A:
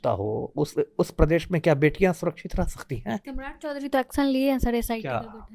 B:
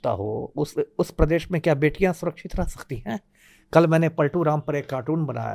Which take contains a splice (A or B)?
A